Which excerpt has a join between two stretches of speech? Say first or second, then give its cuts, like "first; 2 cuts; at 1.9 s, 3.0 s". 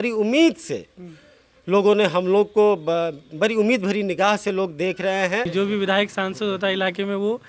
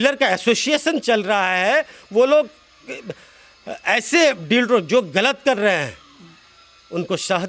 first; 1 cut; at 5.5 s